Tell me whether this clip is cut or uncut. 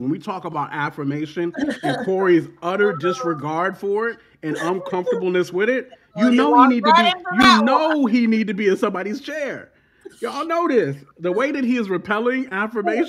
uncut